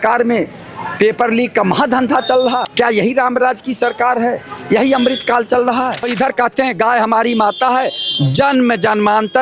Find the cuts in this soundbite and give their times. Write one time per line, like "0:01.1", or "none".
0:02.6
0:06.1